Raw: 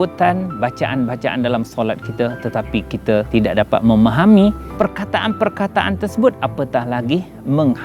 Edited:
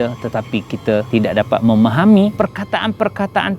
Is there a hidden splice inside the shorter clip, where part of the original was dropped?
yes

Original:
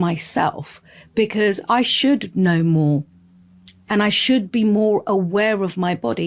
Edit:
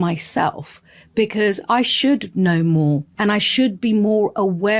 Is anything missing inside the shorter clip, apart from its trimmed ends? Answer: yes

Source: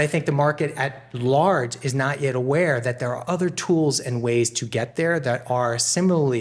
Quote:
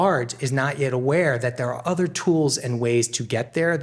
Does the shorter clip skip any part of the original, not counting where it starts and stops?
no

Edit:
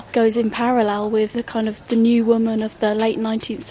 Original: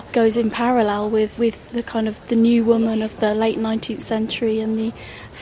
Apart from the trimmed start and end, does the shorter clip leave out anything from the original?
yes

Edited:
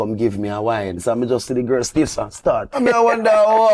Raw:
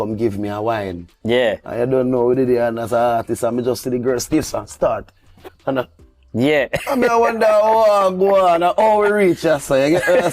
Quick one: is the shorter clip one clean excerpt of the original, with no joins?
no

